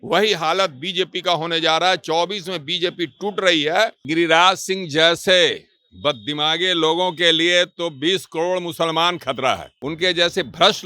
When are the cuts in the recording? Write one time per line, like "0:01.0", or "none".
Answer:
0:04.1
0:09.7